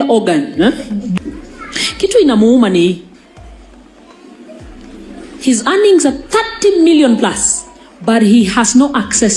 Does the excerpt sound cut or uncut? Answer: cut